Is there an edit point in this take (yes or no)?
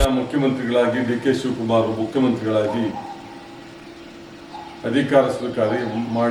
no